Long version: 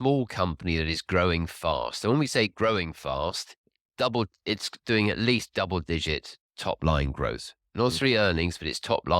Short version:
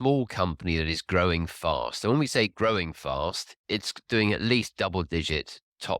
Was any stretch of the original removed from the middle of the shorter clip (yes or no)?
yes